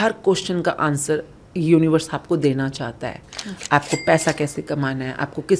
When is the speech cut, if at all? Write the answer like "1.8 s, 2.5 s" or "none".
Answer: none